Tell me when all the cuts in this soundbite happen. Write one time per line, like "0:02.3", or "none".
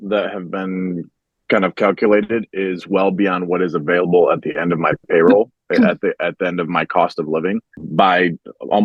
0:07.8